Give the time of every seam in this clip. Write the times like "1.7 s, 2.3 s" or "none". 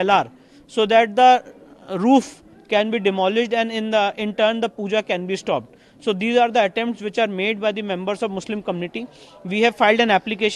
none